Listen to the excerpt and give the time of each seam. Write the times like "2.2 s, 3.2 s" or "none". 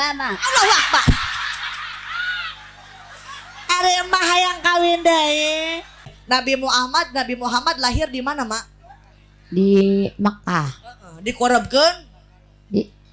6.2 s